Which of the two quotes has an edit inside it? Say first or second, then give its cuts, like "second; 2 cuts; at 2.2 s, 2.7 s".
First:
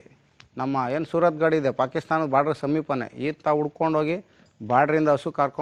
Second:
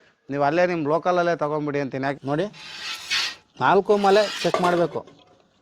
second; 1 cut; at 2.1 s